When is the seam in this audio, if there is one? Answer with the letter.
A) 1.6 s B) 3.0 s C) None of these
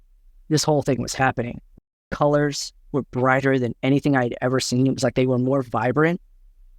A